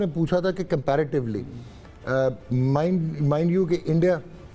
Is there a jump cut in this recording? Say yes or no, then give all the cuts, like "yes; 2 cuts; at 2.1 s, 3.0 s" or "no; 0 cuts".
no; 0 cuts